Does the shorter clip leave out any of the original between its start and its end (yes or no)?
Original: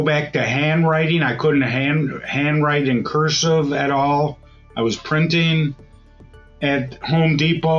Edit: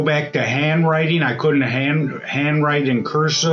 no